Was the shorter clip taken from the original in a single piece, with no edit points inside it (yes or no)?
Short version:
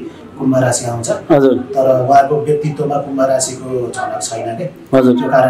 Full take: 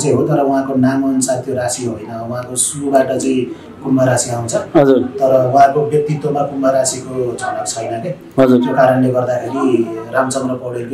yes